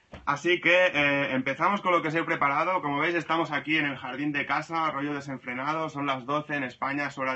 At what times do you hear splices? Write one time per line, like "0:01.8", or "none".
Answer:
0:06.5